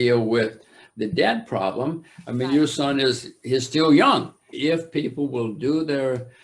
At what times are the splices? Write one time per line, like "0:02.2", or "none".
0:04.5